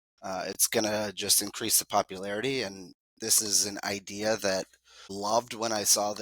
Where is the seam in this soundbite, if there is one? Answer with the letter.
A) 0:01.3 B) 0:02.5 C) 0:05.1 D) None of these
C